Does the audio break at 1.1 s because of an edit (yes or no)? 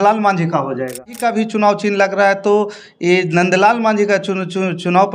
yes